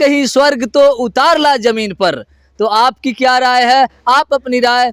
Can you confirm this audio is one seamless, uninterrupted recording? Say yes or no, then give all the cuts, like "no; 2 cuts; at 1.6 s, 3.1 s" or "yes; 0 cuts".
yes; 0 cuts